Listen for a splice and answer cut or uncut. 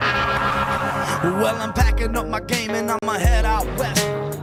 uncut